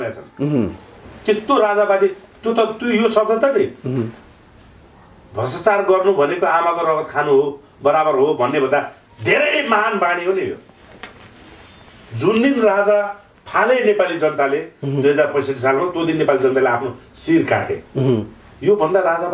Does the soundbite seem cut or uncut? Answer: uncut